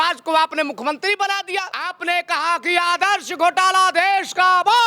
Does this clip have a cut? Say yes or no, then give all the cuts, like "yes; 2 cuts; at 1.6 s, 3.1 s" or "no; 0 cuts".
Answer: yes; 1 cut; at 1.8 s